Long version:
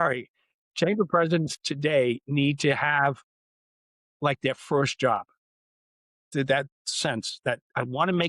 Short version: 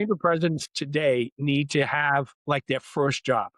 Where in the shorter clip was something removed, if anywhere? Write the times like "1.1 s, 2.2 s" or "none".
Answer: 2.4 s